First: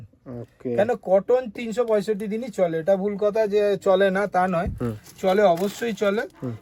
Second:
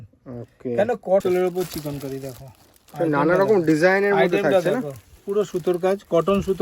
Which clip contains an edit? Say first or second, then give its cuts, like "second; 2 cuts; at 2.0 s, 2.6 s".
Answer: second; 1 cut; at 1.2 s